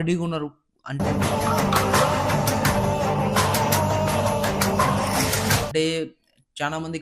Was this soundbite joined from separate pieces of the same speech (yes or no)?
no